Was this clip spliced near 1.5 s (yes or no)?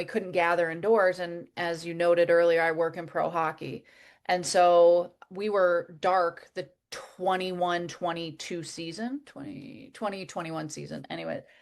yes